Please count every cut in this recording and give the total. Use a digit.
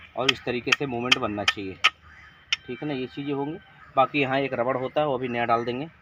0